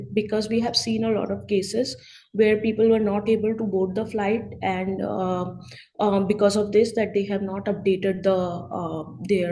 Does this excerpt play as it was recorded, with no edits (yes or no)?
yes